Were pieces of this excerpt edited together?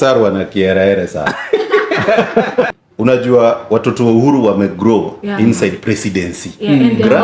yes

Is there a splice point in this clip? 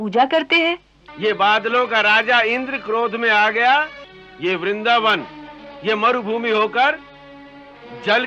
yes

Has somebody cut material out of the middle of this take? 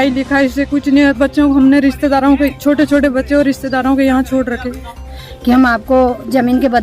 yes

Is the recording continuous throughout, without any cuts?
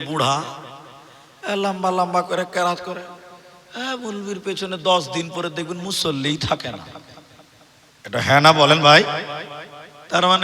yes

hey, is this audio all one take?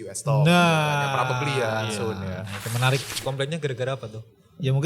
no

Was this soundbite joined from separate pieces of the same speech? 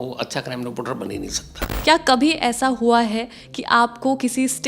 yes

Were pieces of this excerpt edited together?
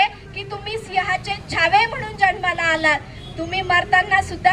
no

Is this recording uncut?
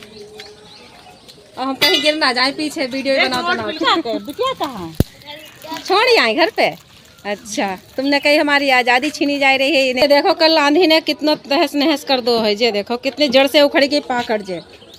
no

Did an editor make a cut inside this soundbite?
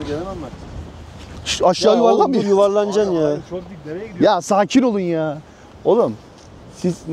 no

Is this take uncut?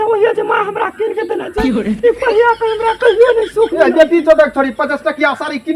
yes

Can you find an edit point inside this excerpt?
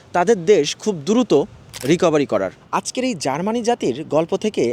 yes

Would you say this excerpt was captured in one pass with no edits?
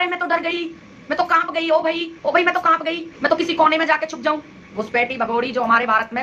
no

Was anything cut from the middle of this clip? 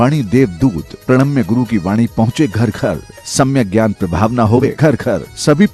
yes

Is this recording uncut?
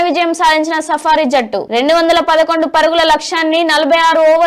yes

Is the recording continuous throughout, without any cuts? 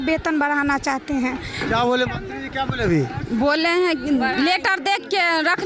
yes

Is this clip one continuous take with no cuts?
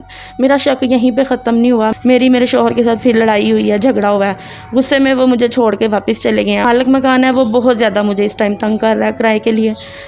no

